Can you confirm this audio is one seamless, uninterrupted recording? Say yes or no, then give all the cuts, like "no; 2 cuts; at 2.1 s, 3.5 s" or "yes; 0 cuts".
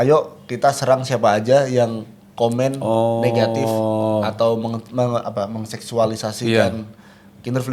yes; 0 cuts